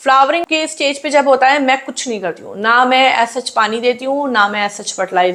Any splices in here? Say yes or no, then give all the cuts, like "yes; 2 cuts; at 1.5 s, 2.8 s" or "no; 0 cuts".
no; 0 cuts